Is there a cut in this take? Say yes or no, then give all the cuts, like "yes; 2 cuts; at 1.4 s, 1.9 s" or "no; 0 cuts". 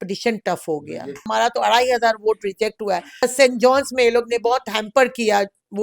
yes; 2 cuts; at 1.3 s, 3.2 s